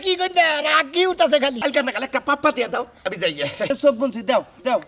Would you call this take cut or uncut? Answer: cut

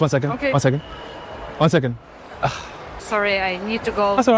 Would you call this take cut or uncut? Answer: cut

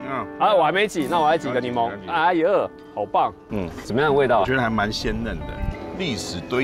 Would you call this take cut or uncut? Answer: cut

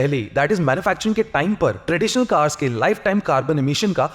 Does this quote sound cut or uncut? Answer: uncut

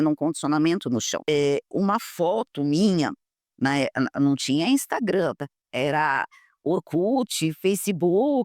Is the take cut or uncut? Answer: cut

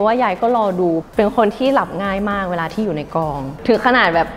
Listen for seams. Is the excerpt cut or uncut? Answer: cut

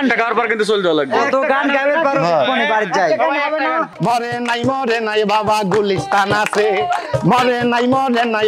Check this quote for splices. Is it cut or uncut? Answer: cut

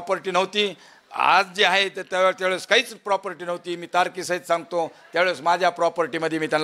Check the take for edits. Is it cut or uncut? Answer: uncut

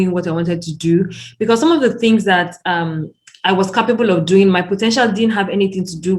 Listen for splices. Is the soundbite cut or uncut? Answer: uncut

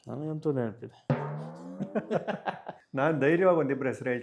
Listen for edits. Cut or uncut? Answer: cut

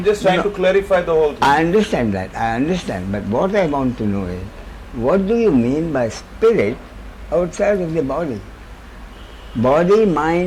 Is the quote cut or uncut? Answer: uncut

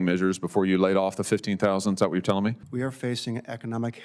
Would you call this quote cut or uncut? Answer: cut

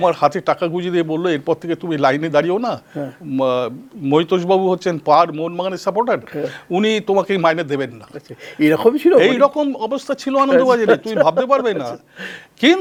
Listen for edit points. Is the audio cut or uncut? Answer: uncut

